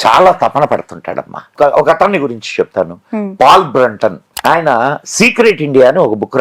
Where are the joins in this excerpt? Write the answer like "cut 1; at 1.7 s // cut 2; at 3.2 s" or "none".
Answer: cut 1; at 1.5 s // cut 2; at 4.3 s

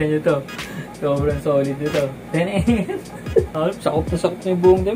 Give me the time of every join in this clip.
cut 1; at 3.5 s

